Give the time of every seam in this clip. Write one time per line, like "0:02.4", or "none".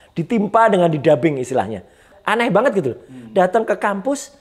0:02.1